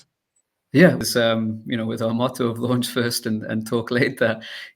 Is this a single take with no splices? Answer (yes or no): no